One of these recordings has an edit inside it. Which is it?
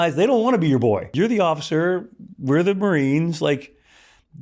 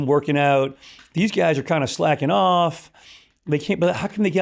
first; 1 cut; at 1.1 s

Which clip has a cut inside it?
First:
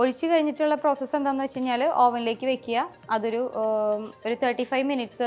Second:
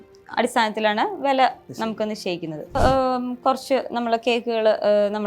second; 1 cut; at 2.7 s

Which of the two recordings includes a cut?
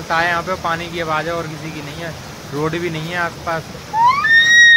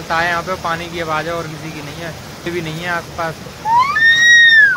second; 1 cut; at 2.4 s

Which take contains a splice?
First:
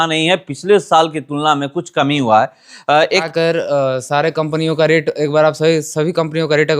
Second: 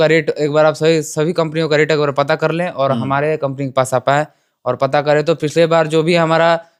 first; 1 cut; at 3.3 s

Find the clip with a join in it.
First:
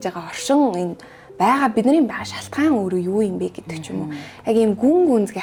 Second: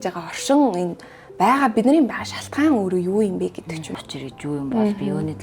second; 1 cut; at 3.9 s

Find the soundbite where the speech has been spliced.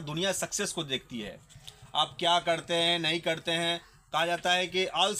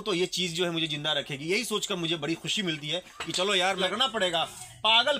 second; 1 cut; at 3.8 s

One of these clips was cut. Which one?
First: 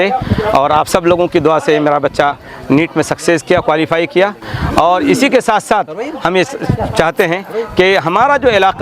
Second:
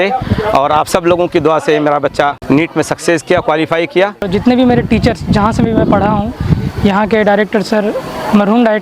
second; 2 cuts; at 2.4 s, 4.2 s

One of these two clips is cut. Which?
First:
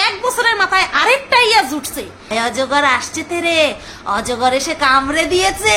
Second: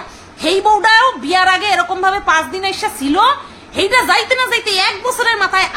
first; 1 cut; at 2.2 s

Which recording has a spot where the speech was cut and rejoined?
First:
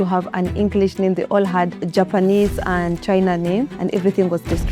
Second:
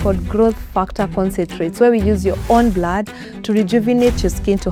first; 2 cuts; at 1.8 s, 3.7 s

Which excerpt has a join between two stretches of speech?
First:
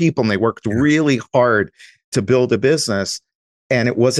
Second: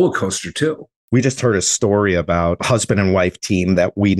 second; 2 cuts; at 0.9 s, 2.6 s

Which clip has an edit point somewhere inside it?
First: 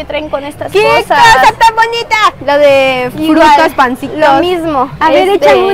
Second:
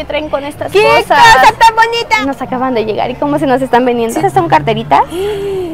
second; 2 cuts; at 2.2 s, 4.2 s

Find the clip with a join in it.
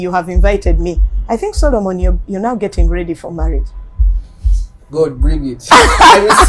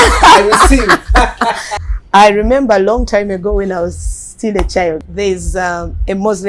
second; 2 cuts; at 1.7 s, 5.1 s

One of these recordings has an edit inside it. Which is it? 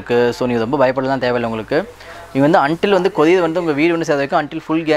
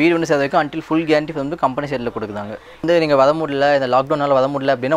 second; 1 cut; at 2.8 s

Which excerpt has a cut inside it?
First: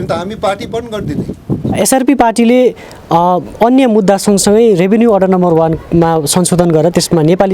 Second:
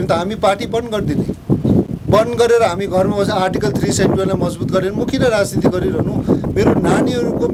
first; 1 cut; at 1.8 s

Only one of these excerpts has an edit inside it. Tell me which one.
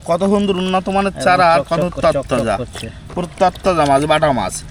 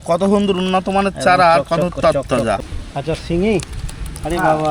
second; 1 cut; at 2.8 s

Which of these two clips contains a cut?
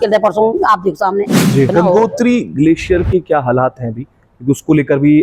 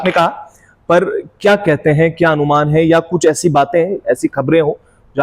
first; 1 cut; at 1.7 s

